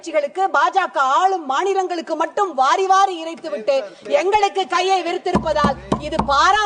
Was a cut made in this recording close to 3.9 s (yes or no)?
no